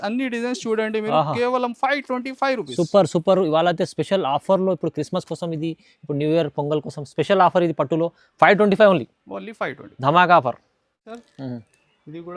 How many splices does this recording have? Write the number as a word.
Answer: zero